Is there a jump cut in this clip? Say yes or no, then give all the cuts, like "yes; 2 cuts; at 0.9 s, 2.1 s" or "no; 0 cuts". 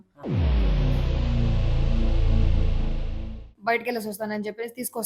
yes; 1 cut; at 3.5 s